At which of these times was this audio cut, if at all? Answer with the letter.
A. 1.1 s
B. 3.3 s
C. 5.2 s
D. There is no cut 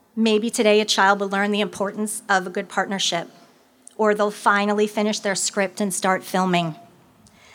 D